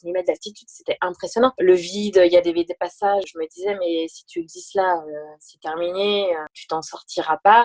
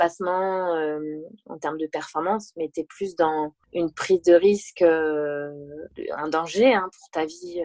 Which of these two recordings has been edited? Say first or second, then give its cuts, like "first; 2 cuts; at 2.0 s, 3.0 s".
first; 3 cuts; at 1.5 s, 3.3 s, 6.5 s